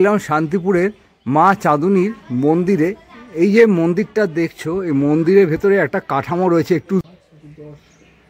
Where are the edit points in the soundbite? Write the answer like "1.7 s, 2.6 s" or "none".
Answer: 7.0 s

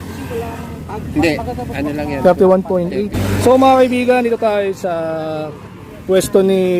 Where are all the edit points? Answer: 3.2 s

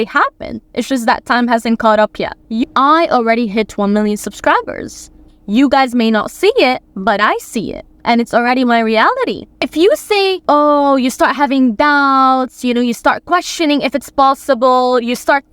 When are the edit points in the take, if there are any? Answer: 2.6 s, 9.7 s

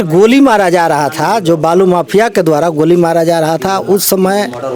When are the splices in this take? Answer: none

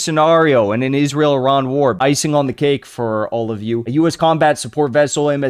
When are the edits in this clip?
2.0 s, 4.1 s

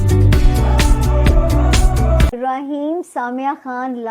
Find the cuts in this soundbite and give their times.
2.3 s

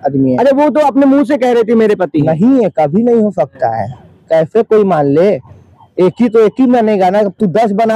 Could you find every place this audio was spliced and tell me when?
none

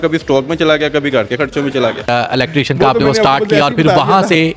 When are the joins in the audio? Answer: 2.1 s

